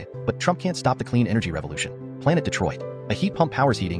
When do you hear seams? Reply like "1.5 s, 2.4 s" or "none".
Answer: none